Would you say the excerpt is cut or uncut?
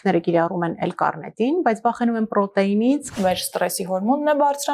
cut